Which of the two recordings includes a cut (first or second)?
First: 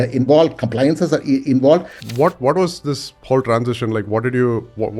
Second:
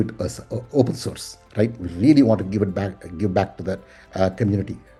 first